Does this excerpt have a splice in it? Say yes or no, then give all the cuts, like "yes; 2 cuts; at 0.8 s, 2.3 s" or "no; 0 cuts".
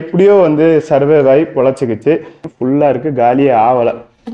yes; 1 cut; at 2.4 s